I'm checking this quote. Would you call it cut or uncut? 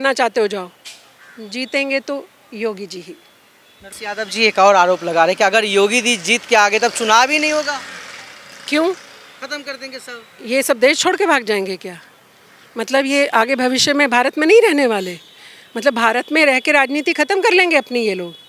uncut